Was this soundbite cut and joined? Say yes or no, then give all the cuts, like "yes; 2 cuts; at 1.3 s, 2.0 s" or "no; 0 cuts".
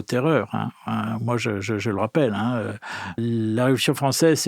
yes; 1 cut; at 3.1 s